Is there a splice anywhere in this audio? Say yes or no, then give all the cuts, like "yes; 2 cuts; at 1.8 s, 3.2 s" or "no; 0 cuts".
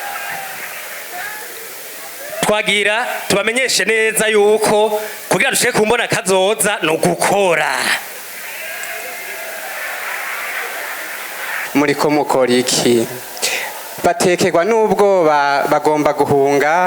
yes; 1 cut; at 11.5 s